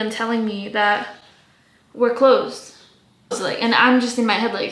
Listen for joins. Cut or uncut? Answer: cut